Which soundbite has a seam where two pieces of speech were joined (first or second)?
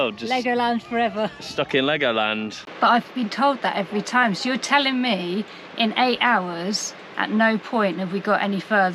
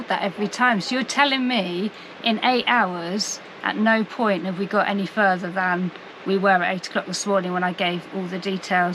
first